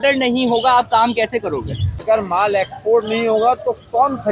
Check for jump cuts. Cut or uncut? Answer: cut